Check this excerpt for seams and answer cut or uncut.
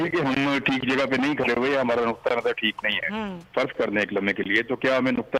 uncut